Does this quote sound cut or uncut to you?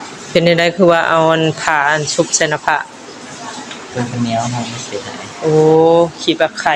uncut